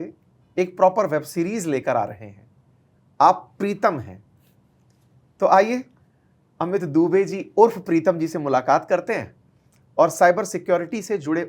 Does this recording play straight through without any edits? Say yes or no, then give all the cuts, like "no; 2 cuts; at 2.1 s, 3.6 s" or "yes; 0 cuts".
yes; 0 cuts